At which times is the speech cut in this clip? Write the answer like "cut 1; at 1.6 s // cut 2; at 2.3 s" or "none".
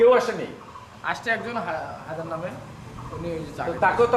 none